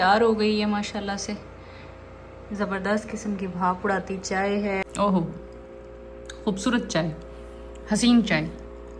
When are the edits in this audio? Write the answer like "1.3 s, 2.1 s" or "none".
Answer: 4.9 s